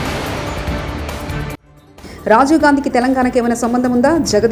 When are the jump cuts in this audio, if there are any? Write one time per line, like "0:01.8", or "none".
none